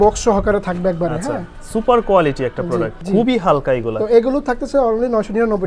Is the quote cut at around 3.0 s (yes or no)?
yes